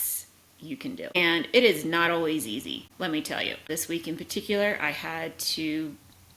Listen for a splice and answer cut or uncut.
cut